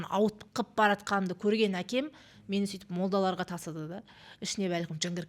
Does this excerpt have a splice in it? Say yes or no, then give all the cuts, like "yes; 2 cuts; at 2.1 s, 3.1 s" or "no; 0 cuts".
no; 0 cuts